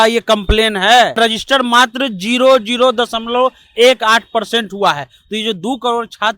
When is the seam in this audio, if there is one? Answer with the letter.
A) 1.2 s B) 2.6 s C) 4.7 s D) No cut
A